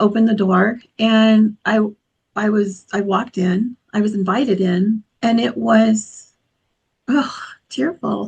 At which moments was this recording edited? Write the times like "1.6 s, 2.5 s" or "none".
5.1 s